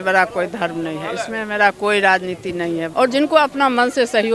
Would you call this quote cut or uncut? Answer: cut